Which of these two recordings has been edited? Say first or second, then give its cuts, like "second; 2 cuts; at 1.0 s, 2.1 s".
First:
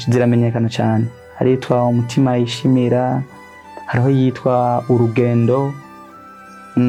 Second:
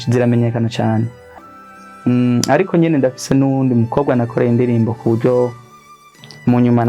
second; 1 cut; at 1.2 s